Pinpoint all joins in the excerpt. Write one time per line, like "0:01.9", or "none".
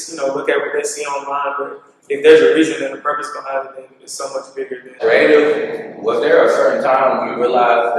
0:05.0